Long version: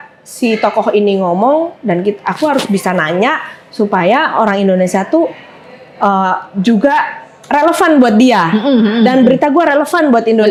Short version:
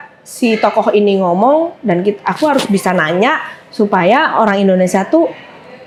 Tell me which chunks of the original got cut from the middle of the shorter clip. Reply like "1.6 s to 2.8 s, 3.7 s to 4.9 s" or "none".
none